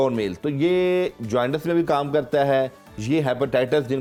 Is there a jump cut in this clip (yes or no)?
no